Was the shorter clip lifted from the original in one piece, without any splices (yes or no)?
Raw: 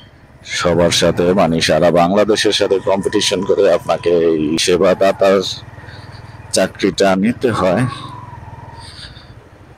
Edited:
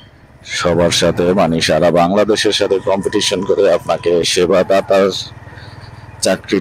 no